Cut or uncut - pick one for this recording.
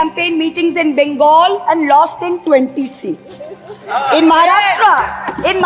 uncut